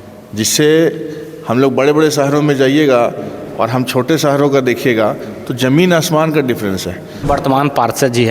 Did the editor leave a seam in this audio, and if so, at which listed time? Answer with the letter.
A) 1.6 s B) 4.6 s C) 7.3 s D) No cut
C